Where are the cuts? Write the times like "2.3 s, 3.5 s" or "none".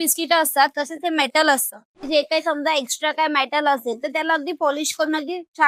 2.0 s